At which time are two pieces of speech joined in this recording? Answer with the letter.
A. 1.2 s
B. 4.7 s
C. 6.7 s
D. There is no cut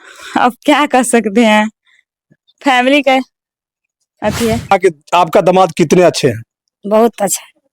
B